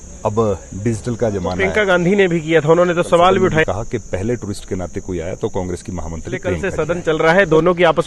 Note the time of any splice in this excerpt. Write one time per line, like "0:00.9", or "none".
0:01.6
0:03.6
0:06.6